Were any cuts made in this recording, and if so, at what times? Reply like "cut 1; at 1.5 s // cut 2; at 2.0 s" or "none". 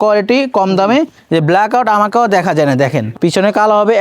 cut 1; at 1.2 s // cut 2; at 3.1 s